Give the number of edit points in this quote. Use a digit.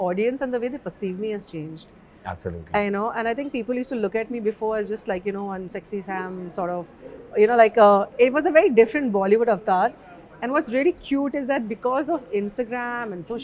0